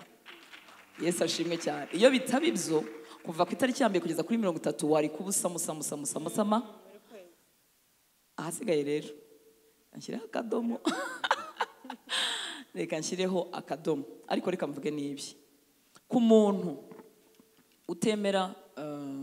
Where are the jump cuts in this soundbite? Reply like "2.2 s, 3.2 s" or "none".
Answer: none